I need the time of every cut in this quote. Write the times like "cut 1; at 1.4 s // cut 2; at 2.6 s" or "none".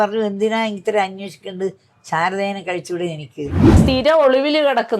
cut 1; at 3.7 s